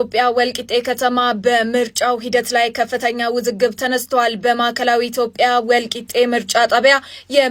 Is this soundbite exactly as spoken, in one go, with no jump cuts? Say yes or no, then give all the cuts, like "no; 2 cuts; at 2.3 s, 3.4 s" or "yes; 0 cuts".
yes; 0 cuts